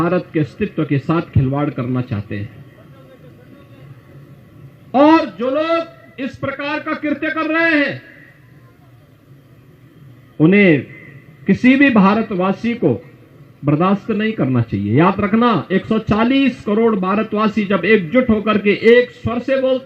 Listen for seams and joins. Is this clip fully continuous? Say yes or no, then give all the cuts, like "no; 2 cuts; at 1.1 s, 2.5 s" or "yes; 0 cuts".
yes; 0 cuts